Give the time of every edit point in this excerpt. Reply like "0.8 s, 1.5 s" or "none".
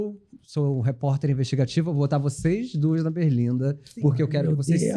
none